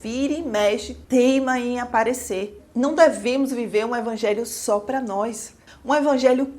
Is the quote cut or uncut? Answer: cut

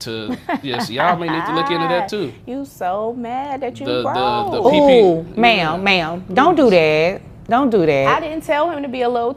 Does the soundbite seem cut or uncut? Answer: uncut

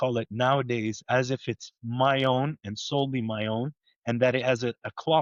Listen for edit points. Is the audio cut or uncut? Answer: uncut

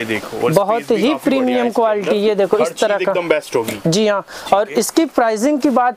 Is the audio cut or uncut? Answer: uncut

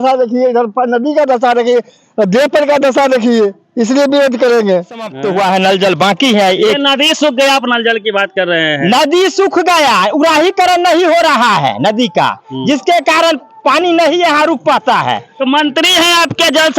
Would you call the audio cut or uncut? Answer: cut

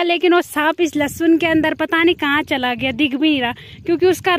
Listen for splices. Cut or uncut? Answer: uncut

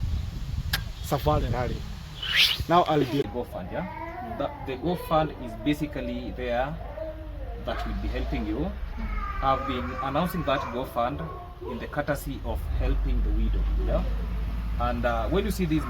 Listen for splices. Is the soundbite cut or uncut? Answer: cut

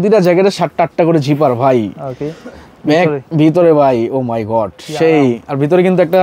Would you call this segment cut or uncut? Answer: uncut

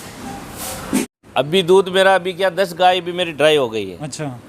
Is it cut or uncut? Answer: cut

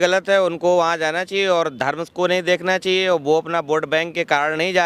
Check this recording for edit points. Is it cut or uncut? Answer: uncut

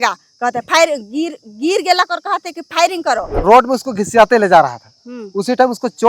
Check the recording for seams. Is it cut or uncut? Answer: cut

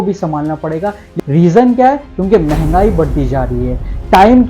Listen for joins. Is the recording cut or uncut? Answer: cut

